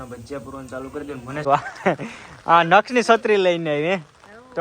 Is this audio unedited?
no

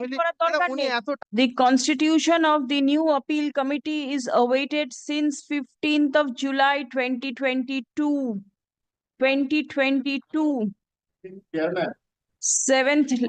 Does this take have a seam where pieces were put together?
yes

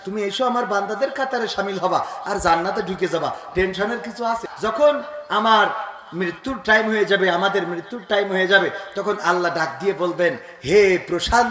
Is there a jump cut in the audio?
yes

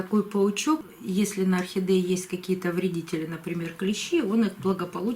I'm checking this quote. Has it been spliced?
yes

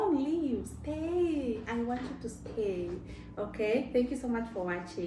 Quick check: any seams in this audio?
no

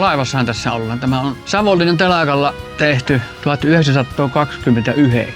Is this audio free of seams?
no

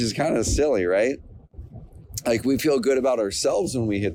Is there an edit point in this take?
no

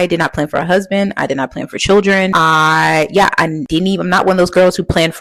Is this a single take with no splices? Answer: yes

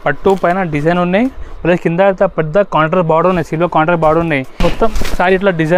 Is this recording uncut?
no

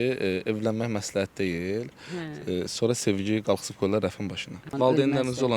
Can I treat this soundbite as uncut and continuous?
no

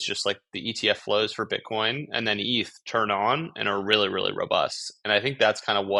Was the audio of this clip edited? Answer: no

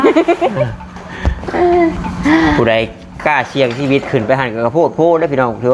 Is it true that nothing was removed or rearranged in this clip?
yes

